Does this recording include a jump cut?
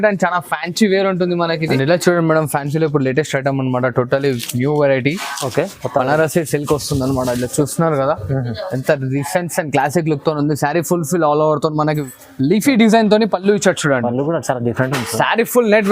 yes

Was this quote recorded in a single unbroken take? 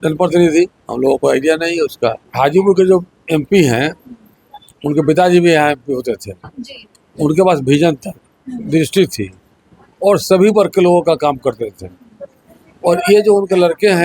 no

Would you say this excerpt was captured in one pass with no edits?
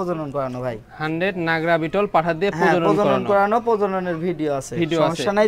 yes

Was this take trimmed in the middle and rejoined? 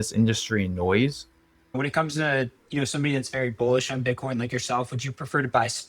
yes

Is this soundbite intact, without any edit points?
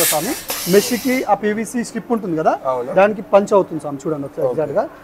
yes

